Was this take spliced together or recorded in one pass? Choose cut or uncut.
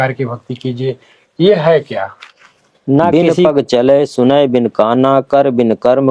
cut